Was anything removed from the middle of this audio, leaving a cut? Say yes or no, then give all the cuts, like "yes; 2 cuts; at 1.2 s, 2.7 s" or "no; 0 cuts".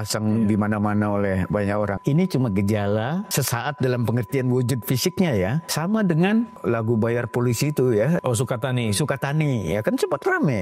yes; 5 cuts; at 2.0 s, 3.3 s, 5.7 s, 6.5 s, 8.2 s